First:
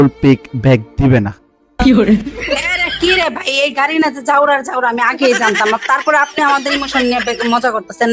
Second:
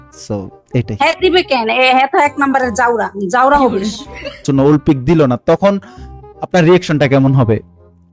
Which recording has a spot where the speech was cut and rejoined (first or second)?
second